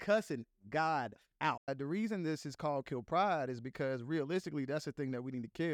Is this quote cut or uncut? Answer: cut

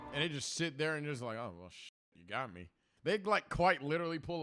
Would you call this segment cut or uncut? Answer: cut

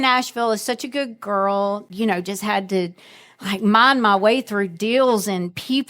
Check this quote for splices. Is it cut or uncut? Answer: cut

